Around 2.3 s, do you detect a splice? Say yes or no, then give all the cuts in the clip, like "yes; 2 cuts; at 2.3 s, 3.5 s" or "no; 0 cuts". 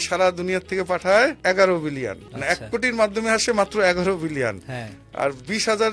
yes; 2 cuts; at 1.4 s, 2.3 s